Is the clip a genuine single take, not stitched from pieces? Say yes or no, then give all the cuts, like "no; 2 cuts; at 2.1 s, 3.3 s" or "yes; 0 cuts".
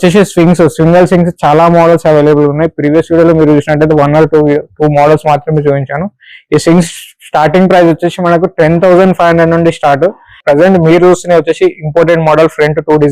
no; 1 cut; at 10.4 s